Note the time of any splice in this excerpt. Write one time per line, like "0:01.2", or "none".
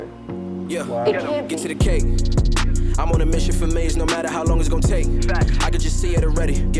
0:01.5

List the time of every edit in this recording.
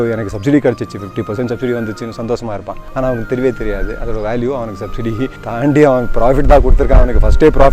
0:02.8
0:05.4

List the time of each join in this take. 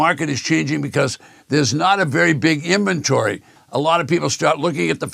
0:03.6

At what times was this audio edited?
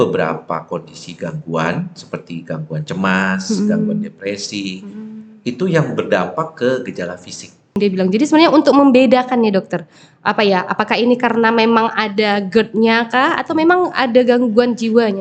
0:07.8

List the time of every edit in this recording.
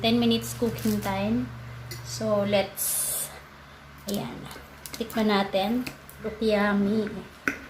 0:06.3

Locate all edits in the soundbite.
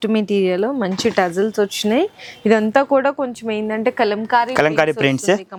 none

